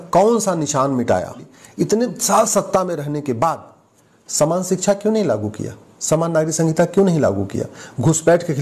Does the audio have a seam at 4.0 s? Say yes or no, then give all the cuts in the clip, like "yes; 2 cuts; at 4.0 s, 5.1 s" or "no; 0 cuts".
no; 1 cut; at 1.6 s